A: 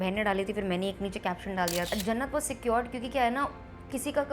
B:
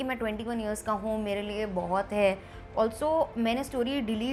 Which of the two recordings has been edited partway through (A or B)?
A